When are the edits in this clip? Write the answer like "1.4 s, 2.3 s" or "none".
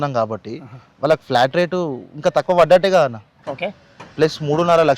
none